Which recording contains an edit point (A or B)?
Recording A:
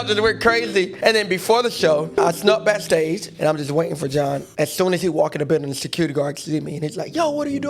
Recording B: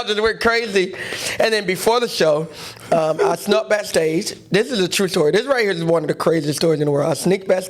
A